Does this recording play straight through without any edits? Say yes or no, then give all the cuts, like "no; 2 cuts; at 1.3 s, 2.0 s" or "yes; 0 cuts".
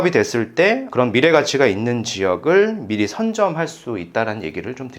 yes; 0 cuts